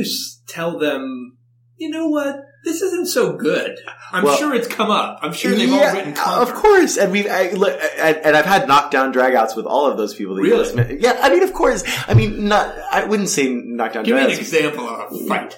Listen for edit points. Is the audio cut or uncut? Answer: uncut